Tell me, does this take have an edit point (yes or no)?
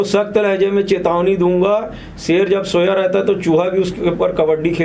no